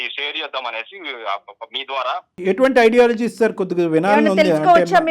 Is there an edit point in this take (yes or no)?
yes